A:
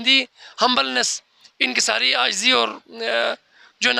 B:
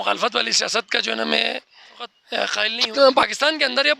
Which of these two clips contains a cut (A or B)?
B